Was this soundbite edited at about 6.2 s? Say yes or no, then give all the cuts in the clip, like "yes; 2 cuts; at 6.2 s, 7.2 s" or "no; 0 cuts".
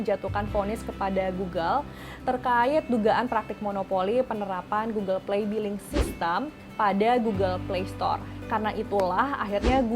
no; 1 cut; at 8.3 s